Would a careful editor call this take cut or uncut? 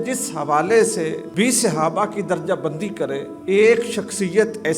cut